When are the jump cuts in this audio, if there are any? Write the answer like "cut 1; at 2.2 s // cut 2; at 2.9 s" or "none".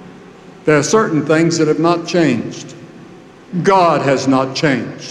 cut 1; at 3.3 s